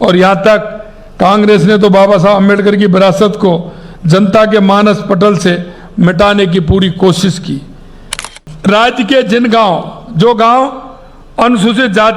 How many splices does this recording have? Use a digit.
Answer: 1